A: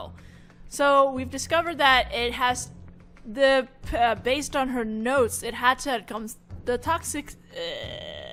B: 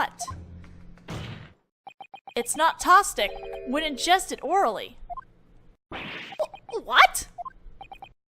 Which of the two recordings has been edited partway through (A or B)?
B